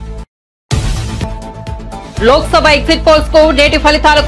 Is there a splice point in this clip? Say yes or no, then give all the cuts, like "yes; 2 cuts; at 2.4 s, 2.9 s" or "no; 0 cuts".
no; 0 cuts